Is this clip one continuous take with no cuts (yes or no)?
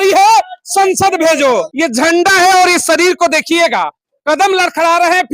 no